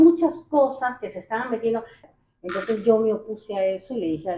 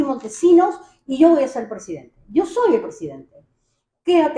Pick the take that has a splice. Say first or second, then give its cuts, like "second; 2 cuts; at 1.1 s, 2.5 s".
first; 1 cut; at 2.0 s